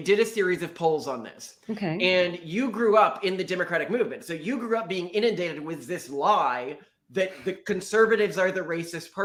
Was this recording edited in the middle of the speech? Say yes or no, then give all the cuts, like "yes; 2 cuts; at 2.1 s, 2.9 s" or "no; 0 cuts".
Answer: no; 0 cuts